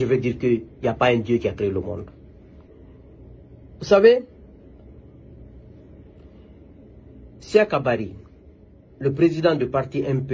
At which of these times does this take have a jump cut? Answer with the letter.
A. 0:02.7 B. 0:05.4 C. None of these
A